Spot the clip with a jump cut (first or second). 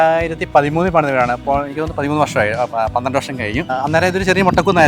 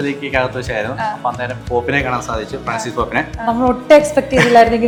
first